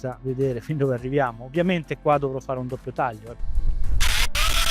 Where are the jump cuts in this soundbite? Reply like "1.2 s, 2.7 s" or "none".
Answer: 3.4 s